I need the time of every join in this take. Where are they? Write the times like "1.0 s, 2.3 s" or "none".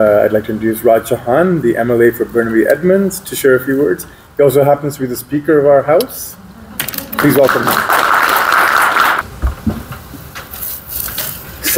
none